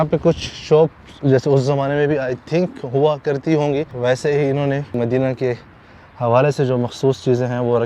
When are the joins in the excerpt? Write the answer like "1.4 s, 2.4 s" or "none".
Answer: 3.9 s, 4.9 s

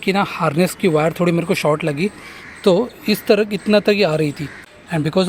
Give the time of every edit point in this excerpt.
none

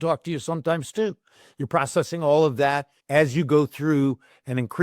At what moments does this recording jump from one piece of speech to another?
2.9 s

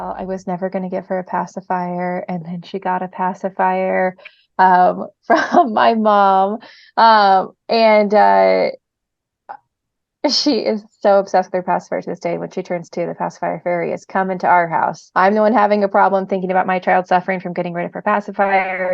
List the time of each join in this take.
15.0 s

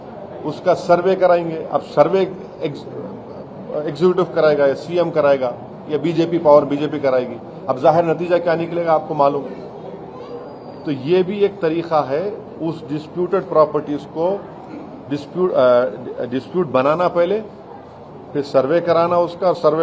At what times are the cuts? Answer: none

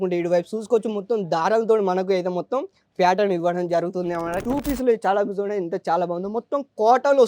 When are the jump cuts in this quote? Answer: 4.4 s

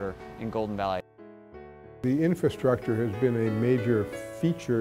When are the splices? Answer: 1.7 s

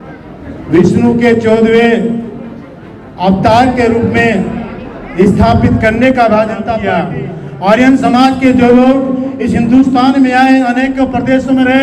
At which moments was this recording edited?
6.8 s

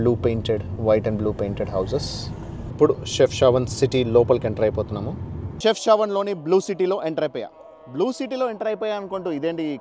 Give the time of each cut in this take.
2.7 s, 5.5 s

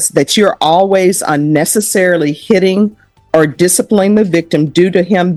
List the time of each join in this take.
none

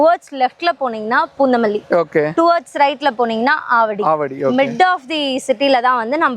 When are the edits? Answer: none

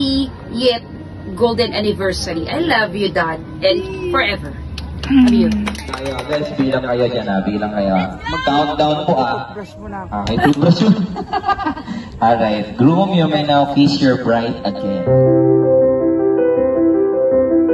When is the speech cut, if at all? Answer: none

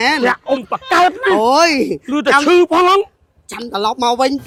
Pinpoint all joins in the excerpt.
none

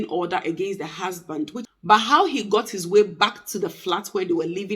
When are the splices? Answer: 1.6 s

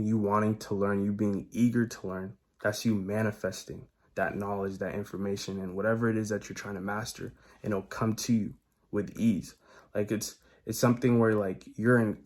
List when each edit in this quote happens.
none

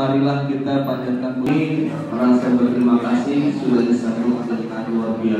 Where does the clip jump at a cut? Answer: none

